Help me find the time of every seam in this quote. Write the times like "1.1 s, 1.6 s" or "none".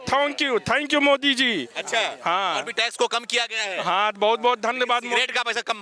none